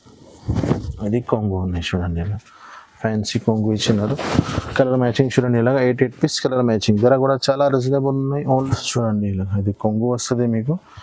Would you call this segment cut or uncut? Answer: cut